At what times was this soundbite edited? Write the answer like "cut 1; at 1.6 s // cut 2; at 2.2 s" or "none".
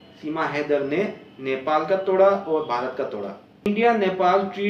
cut 1; at 3.7 s

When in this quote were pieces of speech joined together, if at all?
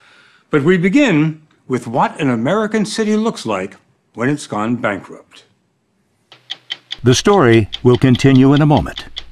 cut 1; at 8.1 s

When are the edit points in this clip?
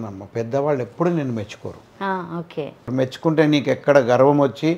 cut 1; at 2.9 s

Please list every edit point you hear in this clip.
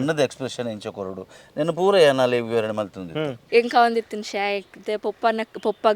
cut 1; at 3.4 s

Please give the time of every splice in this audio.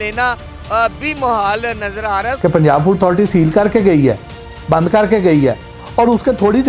cut 1; at 2.3 s

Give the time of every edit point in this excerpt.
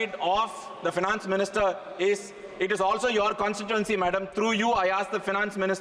none

